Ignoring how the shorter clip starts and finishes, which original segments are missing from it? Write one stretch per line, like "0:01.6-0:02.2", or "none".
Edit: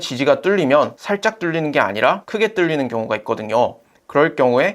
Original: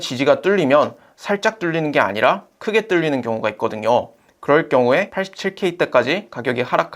0:01.0-0:01.2
0:02.5-0:02.6